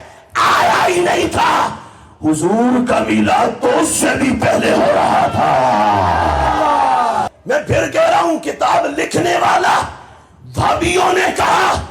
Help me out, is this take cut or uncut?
cut